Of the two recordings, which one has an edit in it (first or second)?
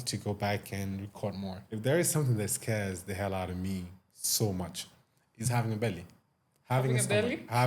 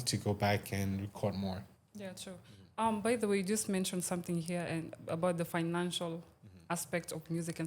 first